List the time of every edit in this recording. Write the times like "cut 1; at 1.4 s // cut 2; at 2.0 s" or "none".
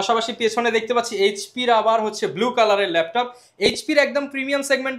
none